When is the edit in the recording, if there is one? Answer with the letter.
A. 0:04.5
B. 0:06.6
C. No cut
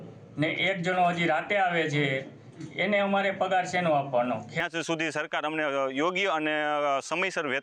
A